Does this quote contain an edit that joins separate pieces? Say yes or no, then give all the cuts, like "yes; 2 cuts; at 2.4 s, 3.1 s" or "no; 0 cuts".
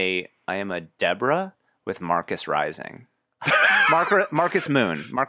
no; 0 cuts